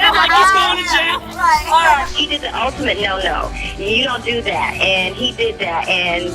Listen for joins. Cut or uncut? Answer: cut